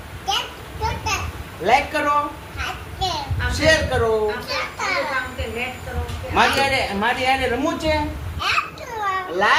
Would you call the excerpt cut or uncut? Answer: uncut